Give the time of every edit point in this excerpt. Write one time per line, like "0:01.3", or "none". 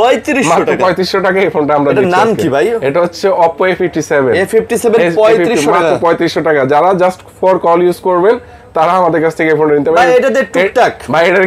none